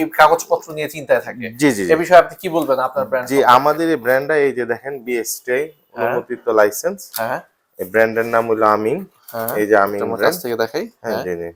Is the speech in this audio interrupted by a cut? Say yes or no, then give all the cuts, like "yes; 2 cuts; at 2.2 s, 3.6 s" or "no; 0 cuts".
no; 0 cuts